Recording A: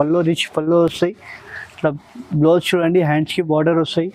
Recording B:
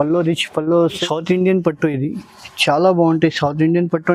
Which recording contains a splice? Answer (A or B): B